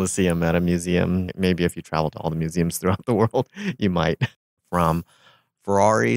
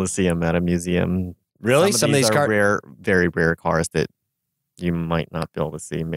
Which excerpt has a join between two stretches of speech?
first; 2 cuts; at 1.3 s, 4.6 s

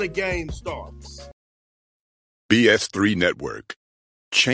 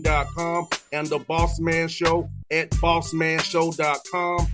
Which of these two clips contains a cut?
first; 1 cut; at 1.3 s

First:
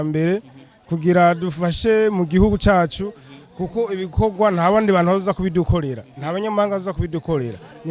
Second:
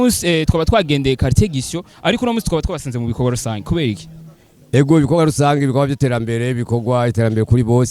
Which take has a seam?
second; 1 cut; at 1.9 s

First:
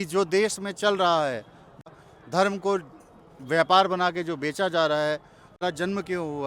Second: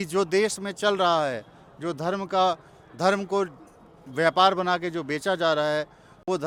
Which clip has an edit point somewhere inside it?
first; 2 cuts; at 1.9 s, 5.6 s

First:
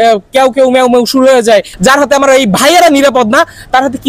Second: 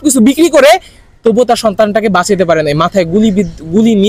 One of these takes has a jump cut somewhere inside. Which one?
first; 1 cut; at 1.7 s

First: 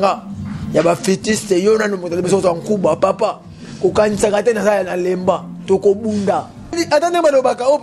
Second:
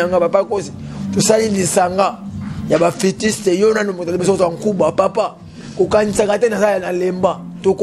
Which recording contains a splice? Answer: first; 1 cut; at 6.8 s

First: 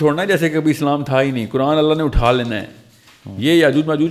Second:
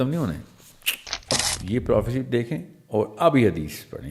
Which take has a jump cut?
second; 1 cut; at 1.3 s

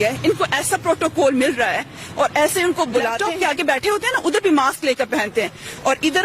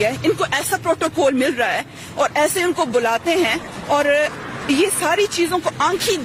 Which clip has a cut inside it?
first; 1 cut; at 3.2 s

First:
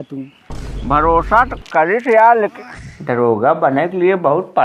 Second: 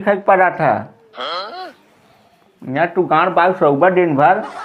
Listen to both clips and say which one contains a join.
first; 1 cut; at 2.6 s

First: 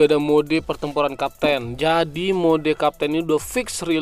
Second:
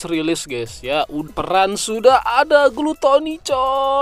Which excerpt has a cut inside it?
second; 1 cut; at 1.3 s

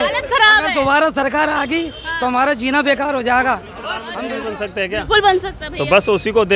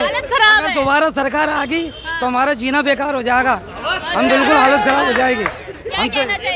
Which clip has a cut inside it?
first; 1 cut; at 4.1 s

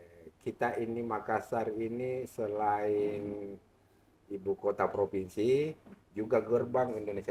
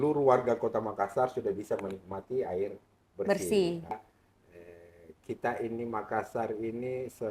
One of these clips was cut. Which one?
second; 1 cut; at 3.9 s

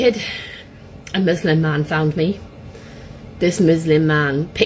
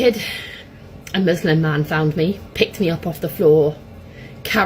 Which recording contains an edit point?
second; 1 cut; at 2.5 s

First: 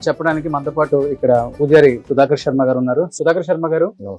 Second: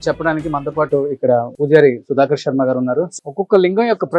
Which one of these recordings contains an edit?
second; 1 cut; at 3.1 s

